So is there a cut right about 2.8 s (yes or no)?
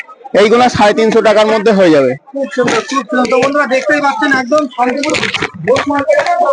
no